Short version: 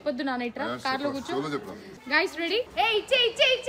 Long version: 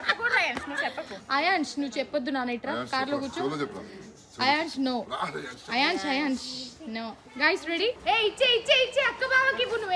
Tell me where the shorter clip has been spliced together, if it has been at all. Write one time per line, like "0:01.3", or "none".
0:01.9